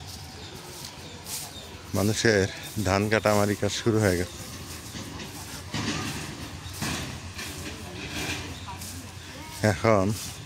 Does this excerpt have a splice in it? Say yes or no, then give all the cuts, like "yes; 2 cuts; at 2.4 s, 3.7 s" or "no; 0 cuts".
no; 0 cuts